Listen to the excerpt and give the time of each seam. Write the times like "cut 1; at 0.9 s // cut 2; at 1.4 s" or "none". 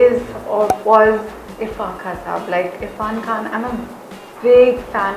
none